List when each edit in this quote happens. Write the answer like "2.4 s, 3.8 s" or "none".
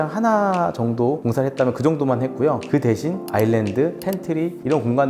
none